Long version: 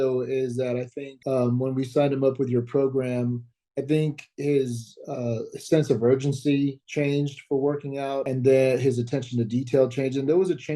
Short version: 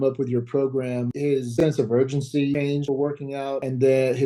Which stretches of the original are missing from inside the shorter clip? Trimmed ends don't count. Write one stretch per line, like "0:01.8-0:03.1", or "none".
0:03.6-0:05.5
0:06.8-0:07.3